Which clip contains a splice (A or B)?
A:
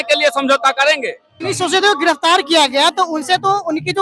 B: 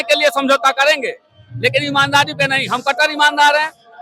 A